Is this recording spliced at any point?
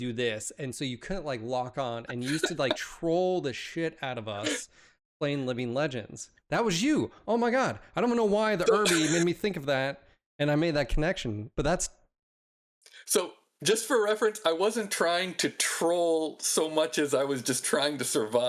no; 0 cuts

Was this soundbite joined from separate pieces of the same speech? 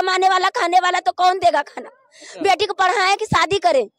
no; 0 cuts

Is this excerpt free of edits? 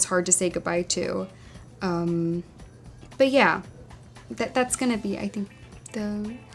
yes; 0 cuts

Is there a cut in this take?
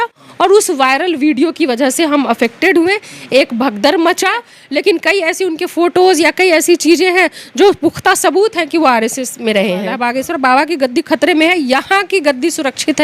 yes; 2 cuts; at 4.6 s, 10.0 s

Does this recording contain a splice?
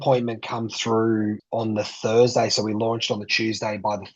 yes; 1 cut; at 1.4 s

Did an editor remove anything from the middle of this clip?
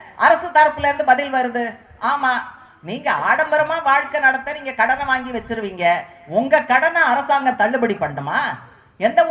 no; 0 cuts

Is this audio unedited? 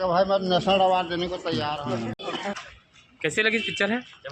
no; 1 cut; at 2.2 s

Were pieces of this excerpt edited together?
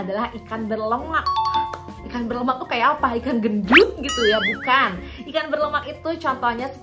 no; 0 cuts

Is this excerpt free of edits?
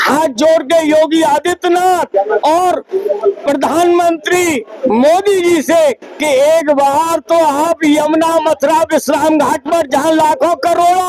yes; 0 cuts

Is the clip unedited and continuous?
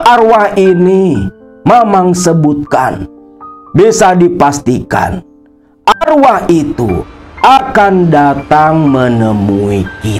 yes; 0 cuts

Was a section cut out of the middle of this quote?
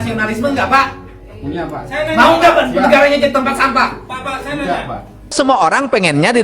yes; 1 cut; at 5.3 s

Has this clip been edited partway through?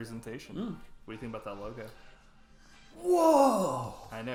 no; 0 cuts

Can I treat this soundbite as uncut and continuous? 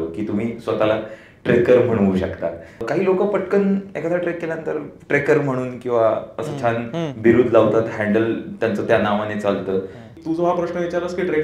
no; 2 cuts; at 2.9 s, 10.2 s

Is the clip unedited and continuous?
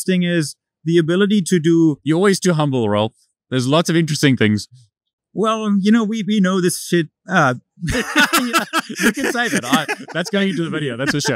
yes; 0 cuts

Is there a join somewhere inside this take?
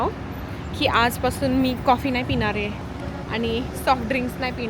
no; 0 cuts

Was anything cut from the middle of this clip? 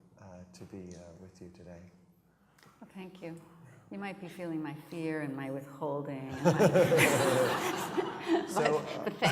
yes; 1 cut; at 1.2 s

